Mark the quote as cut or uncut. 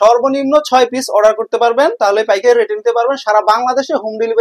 uncut